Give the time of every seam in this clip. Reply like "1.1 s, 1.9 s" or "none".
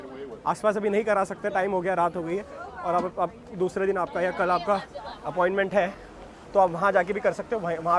none